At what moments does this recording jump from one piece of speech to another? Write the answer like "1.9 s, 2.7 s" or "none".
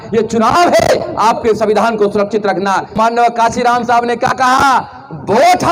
2.9 s